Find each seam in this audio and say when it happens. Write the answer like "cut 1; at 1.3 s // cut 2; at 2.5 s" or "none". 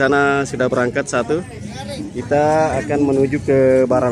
cut 1; at 2.0 s